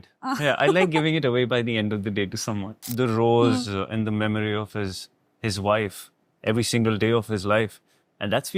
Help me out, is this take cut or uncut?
cut